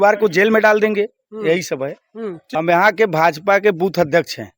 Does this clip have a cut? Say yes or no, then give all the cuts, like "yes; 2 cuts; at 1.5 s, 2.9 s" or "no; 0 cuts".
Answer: yes; 1 cut; at 2.4 s